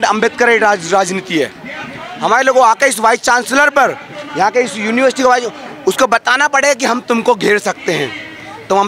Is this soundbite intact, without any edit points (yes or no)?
no